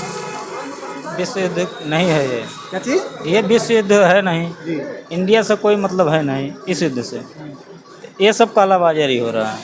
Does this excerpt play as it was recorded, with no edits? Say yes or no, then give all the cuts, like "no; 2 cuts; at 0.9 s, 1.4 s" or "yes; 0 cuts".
yes; 0 cuts